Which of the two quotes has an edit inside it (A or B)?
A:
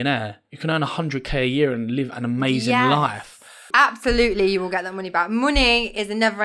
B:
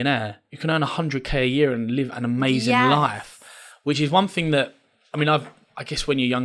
A